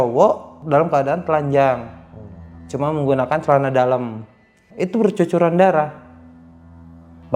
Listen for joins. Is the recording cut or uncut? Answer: cut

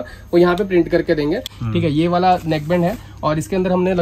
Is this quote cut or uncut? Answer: cut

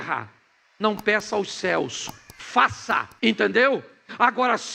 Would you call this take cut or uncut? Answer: cut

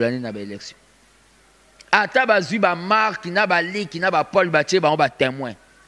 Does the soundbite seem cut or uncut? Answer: uncut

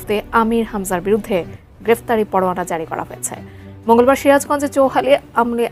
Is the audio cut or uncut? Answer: uncut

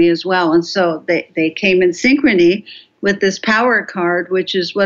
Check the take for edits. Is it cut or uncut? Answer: uncut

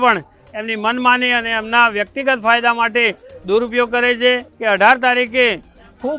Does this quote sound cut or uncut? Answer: cut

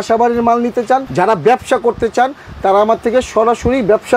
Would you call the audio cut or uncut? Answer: cut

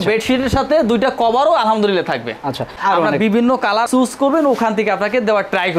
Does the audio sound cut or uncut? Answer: cut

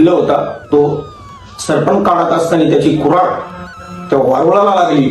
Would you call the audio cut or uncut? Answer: uncut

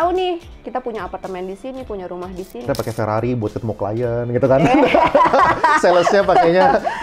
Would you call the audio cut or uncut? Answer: cut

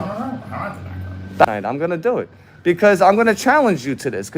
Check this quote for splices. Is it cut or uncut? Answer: cut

